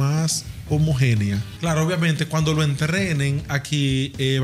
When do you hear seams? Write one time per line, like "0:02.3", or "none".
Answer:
0:01.5